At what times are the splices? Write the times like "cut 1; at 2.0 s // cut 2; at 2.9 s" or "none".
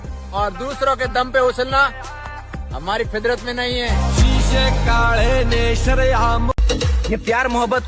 cut 1; at 6.6 s